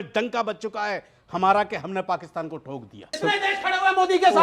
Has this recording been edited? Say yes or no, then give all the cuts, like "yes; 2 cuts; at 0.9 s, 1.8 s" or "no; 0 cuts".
yes; 1 cut; at 3.1 s